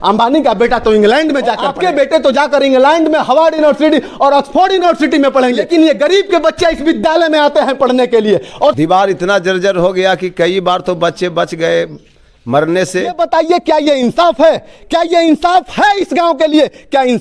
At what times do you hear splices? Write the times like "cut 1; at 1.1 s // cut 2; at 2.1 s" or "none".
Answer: cut 1; at 1.7 s // cut 2; at 5.6 s // cut 3; at 8.8 s // cut 4; at 13.1 s